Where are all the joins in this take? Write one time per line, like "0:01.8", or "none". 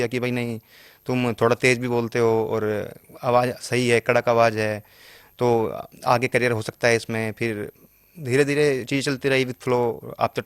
none